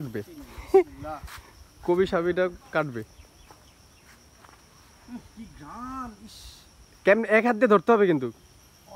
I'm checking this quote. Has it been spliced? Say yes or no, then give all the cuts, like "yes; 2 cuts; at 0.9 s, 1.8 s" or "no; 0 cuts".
no; 0 cuts